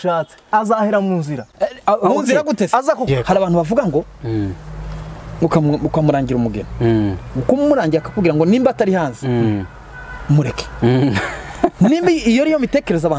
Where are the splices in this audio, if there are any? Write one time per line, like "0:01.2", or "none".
0:03.1